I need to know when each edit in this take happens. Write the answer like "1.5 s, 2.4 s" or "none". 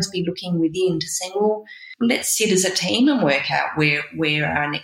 1.8 s